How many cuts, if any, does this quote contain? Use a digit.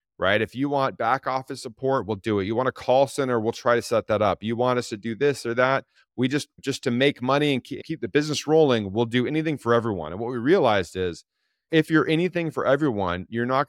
0